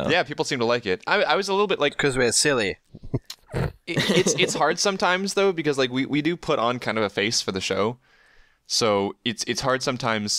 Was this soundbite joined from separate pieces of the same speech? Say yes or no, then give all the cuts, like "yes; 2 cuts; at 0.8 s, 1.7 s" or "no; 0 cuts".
no; 0 cuts